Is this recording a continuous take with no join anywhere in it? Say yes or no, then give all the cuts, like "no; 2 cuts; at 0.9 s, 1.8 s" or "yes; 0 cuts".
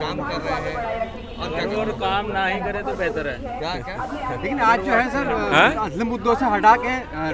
yes; 0 cuts